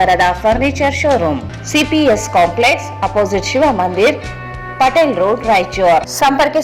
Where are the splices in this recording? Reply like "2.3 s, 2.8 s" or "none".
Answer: 1.4 s